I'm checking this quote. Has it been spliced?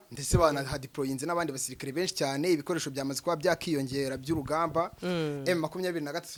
no; 0 cuts

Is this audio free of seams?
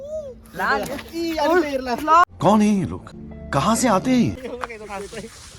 no; 1 cut; at 4.3 s

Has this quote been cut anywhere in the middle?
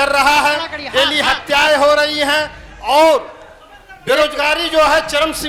no; 0 cuts

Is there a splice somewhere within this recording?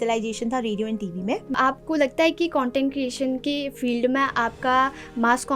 yes; 1 cut; at 1.5 s

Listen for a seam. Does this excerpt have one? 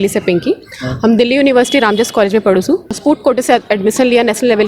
yes; 1 cut; at 3.0 s

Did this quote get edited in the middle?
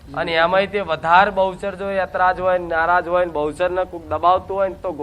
no; 0 cuts

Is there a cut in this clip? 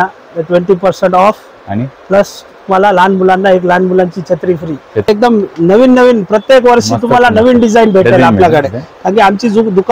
yes; 1 cut; at 5.1 s

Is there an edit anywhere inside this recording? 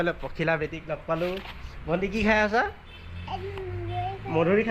no; 0 cuts

